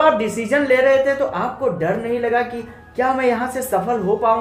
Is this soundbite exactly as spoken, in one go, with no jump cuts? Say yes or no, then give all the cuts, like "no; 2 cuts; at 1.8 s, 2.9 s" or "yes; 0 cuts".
yes; 0 cuts